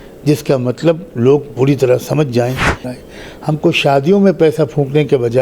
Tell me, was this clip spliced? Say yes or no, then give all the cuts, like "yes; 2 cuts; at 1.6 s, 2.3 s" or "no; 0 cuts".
yes; 1 cut; at 2.9 s